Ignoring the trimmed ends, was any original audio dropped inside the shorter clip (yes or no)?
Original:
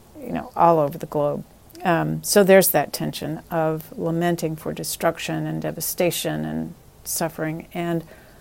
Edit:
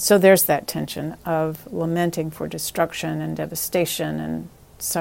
no